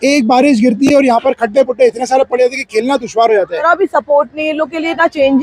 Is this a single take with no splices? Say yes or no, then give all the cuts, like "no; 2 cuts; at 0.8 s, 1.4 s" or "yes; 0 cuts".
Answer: no; 1 cut; at 3.6 s